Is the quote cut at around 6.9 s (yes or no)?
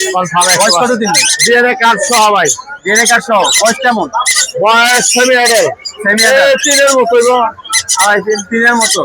no